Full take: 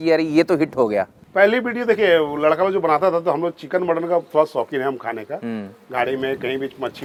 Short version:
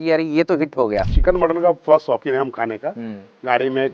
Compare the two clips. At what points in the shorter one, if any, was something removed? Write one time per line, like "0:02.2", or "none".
0:01.1